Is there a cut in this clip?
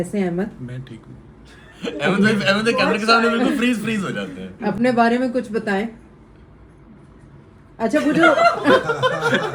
no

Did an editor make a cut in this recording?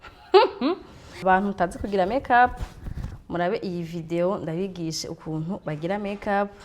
yes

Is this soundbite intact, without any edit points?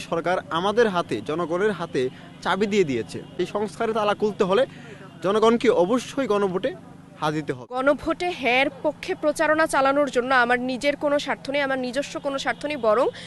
no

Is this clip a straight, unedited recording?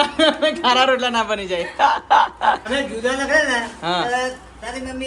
no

